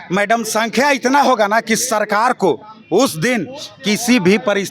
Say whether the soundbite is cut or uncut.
uncut